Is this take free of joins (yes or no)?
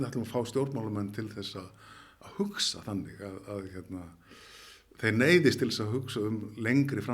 yes